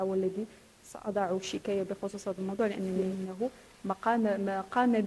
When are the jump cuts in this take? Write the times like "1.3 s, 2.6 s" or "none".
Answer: 3.2 s